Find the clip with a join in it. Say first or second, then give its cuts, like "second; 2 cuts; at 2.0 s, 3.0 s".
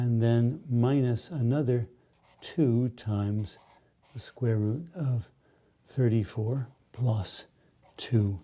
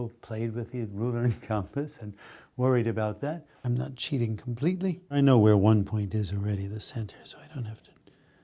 second; 1 cut; at 3.5 s